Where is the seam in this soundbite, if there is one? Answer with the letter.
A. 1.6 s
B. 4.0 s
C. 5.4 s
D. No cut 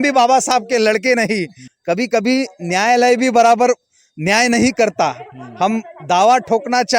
A